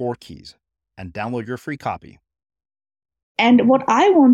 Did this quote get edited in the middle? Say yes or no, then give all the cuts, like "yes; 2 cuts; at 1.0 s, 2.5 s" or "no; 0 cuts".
yes; 1 cut; at 3.2 s